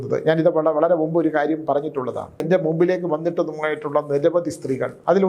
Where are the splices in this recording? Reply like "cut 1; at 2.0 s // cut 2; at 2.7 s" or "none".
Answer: cut 1; at 2.4 s